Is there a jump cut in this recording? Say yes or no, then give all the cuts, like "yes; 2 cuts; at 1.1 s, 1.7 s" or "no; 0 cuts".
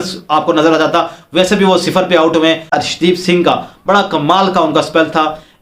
yes; 1 cut; at 2.7 s